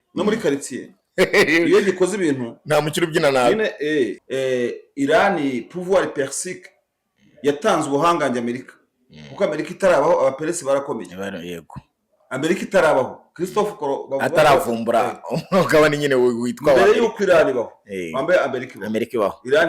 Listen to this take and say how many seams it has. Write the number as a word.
one